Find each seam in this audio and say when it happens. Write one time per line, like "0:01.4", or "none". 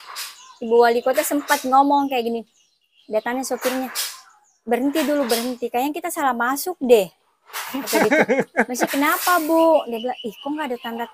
none